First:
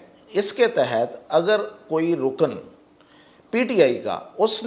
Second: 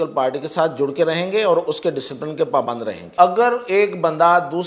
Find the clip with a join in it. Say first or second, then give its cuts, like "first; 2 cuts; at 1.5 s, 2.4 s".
second; 1 cut; at 3.0 s